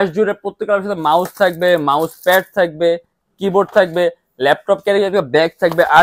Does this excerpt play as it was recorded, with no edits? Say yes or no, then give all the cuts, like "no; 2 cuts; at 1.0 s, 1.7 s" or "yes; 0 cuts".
yes; 0 cuts